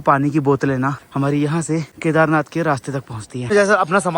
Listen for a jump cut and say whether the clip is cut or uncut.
cut